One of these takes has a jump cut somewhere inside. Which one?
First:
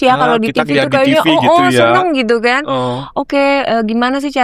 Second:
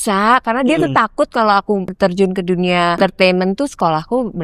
second; 2 cuts; at 1.9 s, 3.0 s

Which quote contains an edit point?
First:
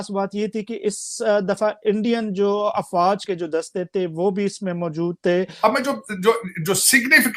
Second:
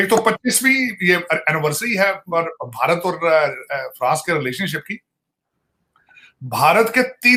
first; 2 cuts; at 3.2 s, 5.5 s

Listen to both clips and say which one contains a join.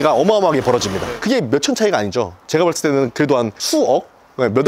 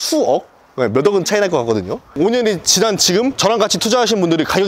second; 1 cut; at 2.1 s

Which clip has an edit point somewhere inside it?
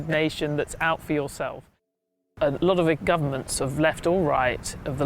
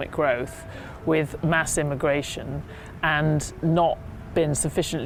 first; 1 cut; at 1.9 s

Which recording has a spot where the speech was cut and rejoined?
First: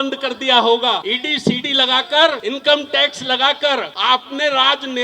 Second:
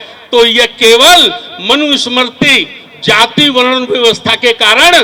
first; 3 cuts; at 1.1 s, 2.4 s, 3.9 s

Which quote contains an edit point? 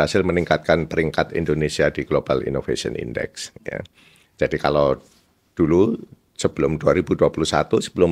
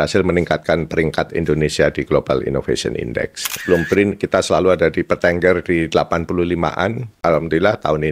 second; 2 cuts; at 3.6 s, 7.1 s

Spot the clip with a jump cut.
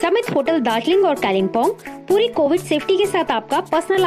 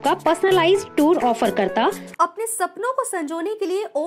second; 1 cut; at 2.1 s

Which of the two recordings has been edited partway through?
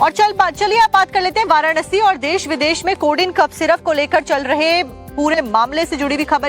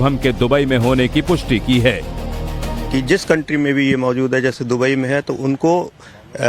first; 1 cut; at 1.3 s

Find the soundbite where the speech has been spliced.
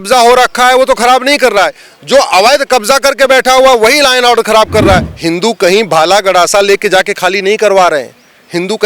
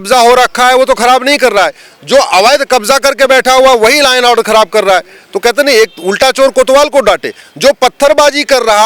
first; 1 cut; at 5.1 s

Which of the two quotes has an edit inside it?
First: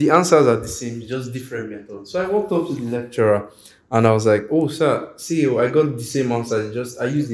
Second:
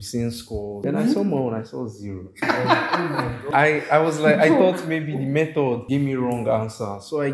second; 4 cuts; at 0.8 s, 2.4 s, 3.5 s, 5.8 s

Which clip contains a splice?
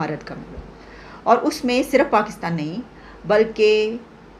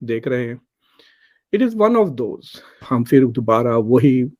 second; 1 cut; at 2.8 s

